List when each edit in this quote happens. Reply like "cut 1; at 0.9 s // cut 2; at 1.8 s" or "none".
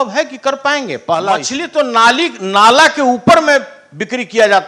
cut 1; at 1.5 s